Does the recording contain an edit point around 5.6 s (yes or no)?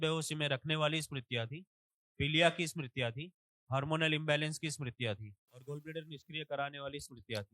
yes